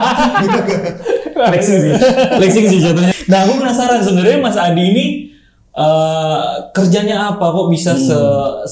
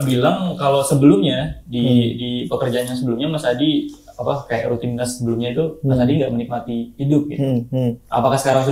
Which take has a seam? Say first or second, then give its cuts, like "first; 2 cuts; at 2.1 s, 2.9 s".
first; 1 cut; at 3.1 s